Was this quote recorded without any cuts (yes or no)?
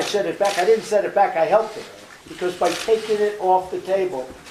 yes